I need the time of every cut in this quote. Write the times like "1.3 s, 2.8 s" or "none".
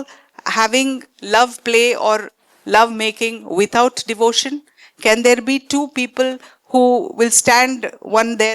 none